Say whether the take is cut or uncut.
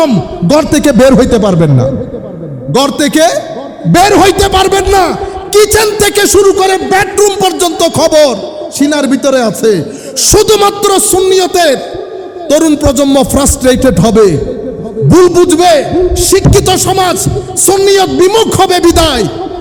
uncut